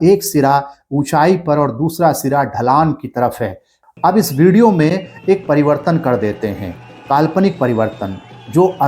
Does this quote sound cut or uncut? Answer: cut